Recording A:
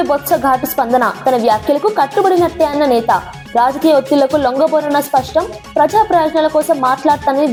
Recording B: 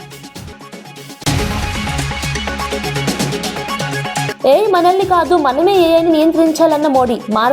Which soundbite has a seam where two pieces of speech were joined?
B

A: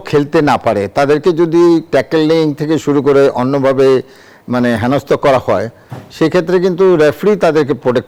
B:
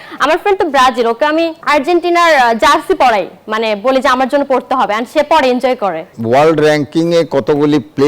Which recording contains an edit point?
B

